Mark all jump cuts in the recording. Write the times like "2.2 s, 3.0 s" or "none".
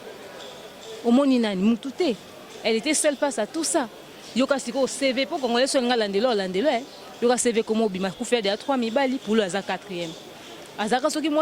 none